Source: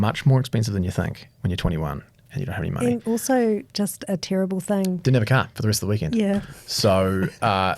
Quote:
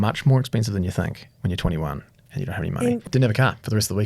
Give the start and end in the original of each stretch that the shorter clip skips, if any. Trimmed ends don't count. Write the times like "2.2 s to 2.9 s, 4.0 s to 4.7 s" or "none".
3.0 s to 5.0 s